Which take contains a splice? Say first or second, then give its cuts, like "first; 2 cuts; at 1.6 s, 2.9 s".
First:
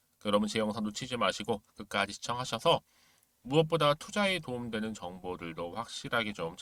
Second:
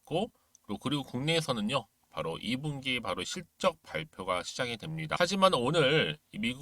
second; 1 cut; at 5.2 s